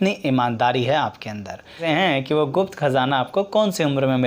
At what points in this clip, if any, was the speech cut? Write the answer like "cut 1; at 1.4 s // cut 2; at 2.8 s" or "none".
cut 1; at 1.8 s